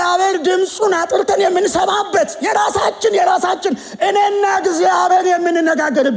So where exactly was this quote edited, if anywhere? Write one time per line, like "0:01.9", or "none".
none

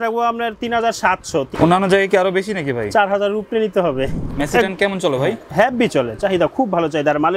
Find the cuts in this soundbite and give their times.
0:01.5
0:04.3

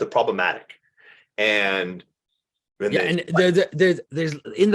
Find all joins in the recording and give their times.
none

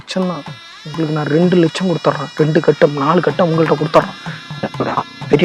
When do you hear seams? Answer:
none

